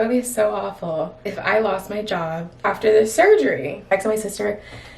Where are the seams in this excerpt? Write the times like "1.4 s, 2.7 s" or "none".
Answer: 1.2 s, 2.7 s, 3.9 s

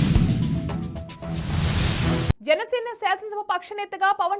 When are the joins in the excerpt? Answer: 2.2 s

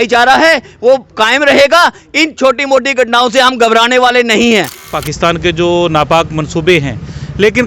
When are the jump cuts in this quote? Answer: 5.0 s

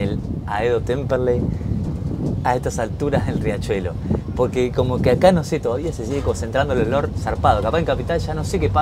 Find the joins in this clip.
none

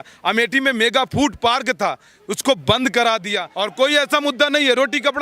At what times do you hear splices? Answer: 3.4 s

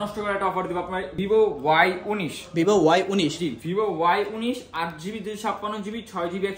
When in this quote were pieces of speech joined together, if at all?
1.1 s

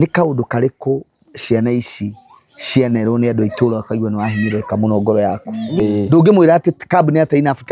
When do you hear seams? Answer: 5.7 s

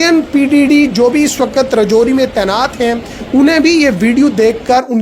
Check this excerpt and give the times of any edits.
none

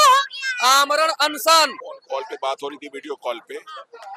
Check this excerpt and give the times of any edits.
1.9 s

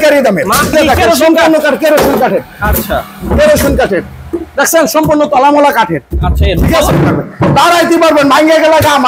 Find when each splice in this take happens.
0.7 s, 6.9 s

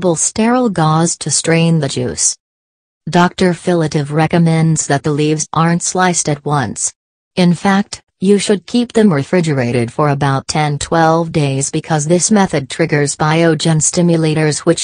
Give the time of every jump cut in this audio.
none

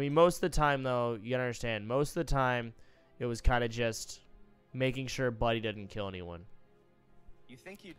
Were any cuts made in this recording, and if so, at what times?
none

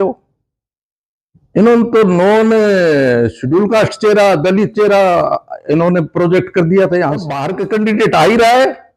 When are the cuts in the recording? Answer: 7.6 s

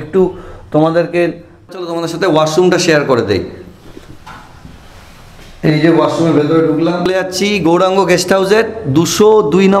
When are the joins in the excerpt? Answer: 2.0 s, 7.0 s

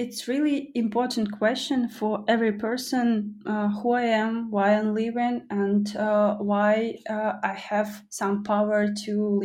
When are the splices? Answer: none

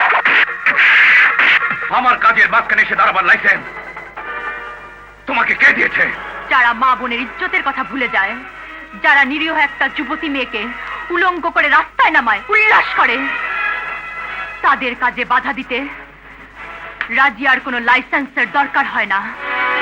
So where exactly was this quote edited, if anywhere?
1.8 s

